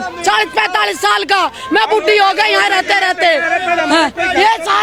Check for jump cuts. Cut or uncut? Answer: uncut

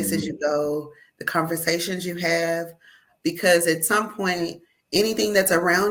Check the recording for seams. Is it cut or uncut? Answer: uncut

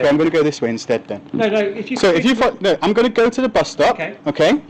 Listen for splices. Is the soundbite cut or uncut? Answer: uncut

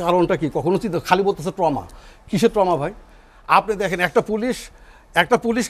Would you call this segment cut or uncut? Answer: uncut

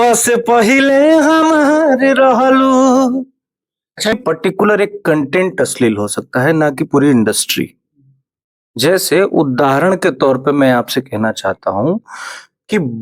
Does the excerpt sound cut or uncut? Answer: cut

